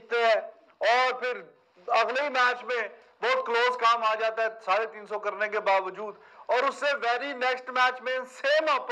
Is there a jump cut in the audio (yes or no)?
no